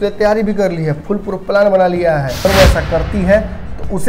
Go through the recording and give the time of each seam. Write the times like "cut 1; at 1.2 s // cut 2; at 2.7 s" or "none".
cut 1; at 2.4 s